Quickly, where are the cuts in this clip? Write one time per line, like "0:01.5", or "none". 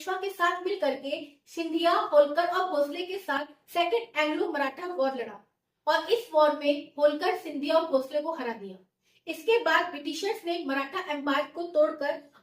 none